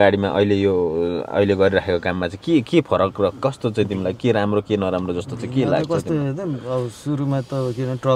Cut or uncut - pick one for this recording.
uncut